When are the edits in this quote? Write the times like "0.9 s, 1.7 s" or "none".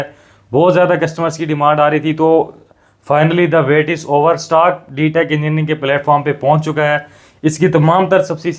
none

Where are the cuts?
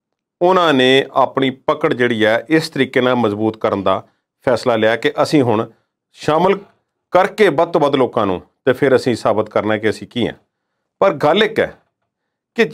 none

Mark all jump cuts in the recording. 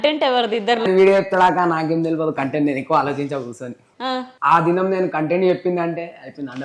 0.8 s, 4.3 s

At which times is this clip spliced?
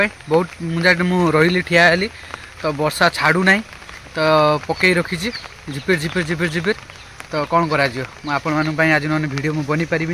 none

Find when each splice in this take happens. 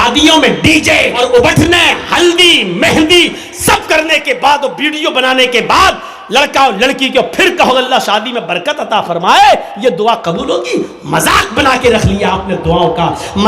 1.1 s

